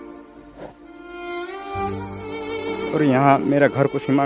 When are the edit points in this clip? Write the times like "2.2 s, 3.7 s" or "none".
none

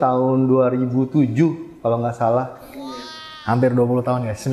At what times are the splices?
none

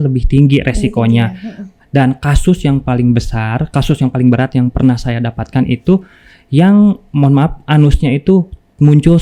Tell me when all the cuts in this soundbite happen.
none

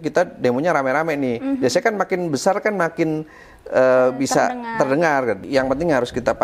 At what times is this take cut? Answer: 5.4 s

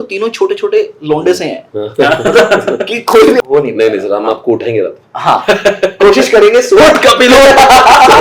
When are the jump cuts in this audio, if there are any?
3.4 s

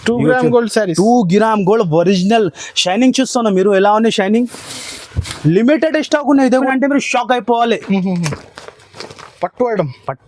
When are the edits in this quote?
6.6 s

